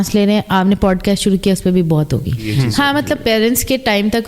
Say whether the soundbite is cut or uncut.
cut